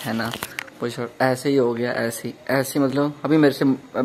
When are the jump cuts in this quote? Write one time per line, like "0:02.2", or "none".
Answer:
none